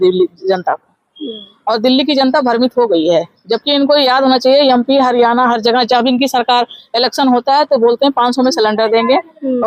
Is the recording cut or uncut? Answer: uncut